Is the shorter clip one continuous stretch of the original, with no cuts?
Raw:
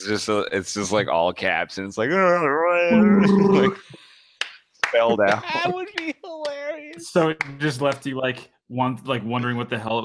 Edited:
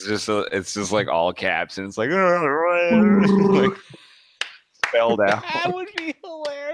yes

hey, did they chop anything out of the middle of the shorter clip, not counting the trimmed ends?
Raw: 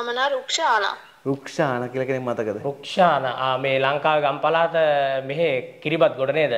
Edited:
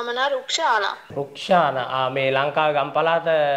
yes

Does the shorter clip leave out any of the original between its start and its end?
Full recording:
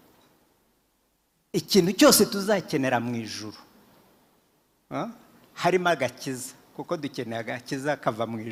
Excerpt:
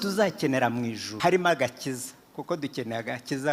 yes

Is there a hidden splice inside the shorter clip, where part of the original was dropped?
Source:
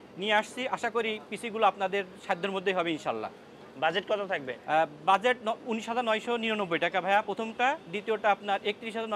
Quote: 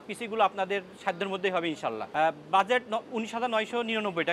yes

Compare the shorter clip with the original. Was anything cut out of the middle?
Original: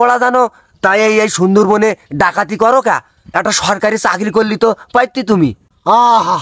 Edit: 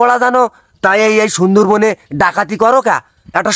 no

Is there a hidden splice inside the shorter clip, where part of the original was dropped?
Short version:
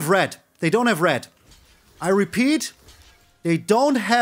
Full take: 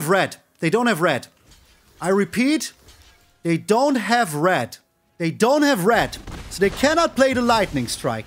no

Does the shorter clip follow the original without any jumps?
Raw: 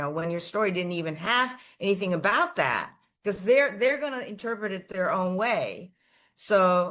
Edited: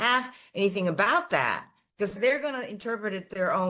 no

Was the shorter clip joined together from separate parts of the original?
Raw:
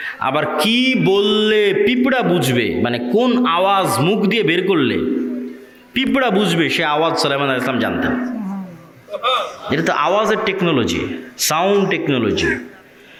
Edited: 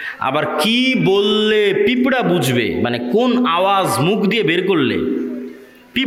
no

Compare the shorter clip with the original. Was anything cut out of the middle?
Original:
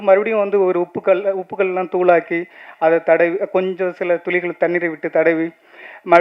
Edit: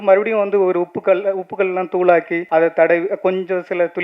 yes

